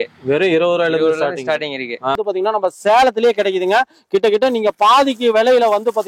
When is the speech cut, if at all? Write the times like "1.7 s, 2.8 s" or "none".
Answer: 2.2 s